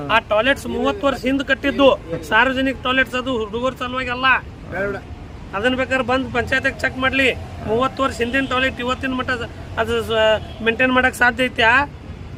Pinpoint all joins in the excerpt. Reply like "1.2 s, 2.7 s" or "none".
none